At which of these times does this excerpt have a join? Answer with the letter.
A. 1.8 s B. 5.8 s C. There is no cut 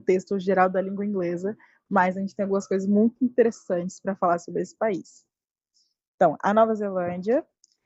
C